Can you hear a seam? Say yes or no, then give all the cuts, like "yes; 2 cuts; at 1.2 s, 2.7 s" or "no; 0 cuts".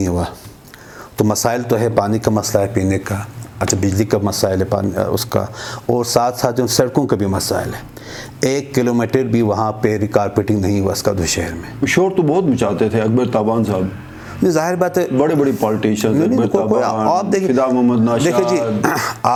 no; 0 cuts